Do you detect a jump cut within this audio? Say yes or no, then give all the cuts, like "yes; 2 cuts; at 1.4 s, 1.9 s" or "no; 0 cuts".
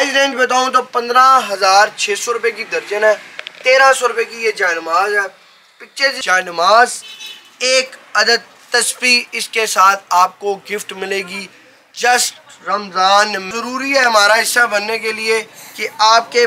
yes; 2 cuts; at 6.2 s, 13.5 s